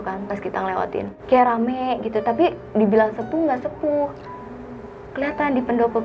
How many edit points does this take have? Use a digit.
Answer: 1